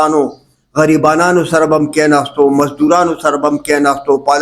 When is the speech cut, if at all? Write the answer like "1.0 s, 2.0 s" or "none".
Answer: none